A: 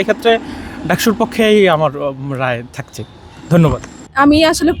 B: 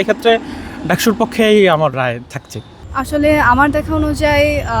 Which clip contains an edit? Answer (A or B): B